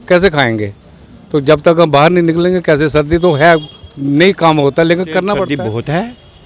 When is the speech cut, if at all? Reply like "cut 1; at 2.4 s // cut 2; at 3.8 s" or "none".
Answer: cut 1; at 5.5 s